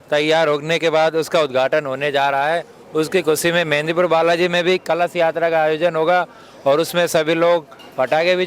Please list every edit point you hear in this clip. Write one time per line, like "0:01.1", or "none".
none